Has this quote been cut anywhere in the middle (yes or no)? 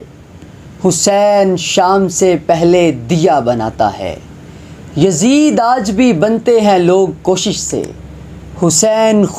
no